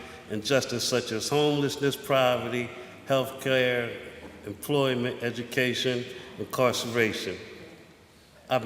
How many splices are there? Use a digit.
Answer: 1